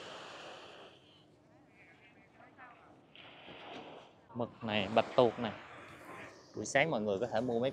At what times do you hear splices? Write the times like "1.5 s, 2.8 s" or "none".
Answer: 4.2 s